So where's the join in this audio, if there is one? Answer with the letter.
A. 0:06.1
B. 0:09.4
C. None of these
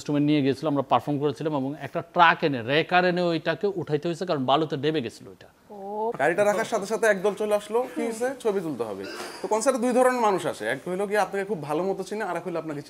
A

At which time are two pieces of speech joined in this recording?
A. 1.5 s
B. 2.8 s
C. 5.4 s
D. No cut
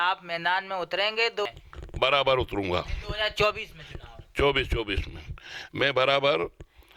A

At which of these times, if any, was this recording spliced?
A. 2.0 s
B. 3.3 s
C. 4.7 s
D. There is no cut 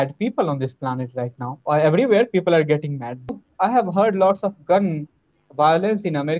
B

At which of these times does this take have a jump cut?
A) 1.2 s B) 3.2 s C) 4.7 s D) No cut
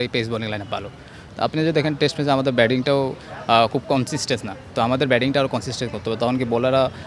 A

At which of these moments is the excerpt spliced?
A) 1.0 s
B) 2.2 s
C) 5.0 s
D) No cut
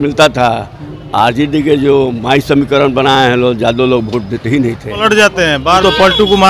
C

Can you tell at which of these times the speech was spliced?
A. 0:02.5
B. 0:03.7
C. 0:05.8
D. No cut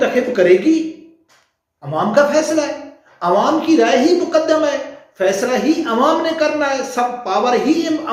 D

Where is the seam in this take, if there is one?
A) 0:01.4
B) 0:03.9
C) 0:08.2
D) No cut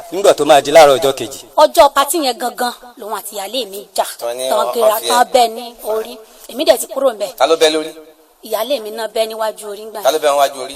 A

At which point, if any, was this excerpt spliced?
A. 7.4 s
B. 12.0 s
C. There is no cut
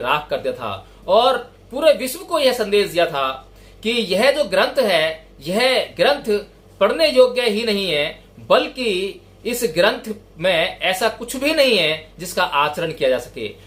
C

